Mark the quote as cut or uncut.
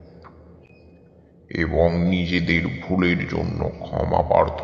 uncut